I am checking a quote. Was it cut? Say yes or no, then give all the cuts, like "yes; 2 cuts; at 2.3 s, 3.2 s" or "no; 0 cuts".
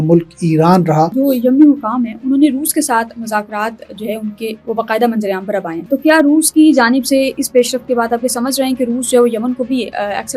yes; 2 cuts; at 1.1 s, 5.8 s